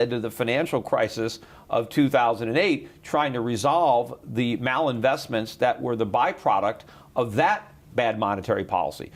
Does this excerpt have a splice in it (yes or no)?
yes